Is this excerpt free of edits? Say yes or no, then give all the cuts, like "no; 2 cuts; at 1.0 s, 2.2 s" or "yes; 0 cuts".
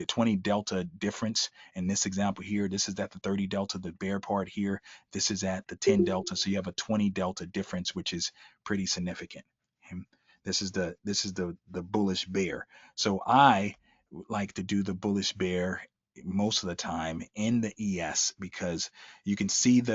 yes; 0 cuts